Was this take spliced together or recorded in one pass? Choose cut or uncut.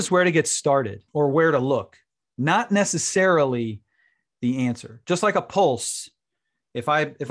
cut